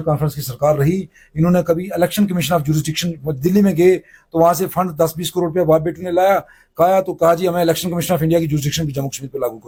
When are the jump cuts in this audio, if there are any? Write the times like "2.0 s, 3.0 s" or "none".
none